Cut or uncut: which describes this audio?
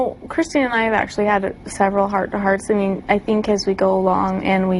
uncut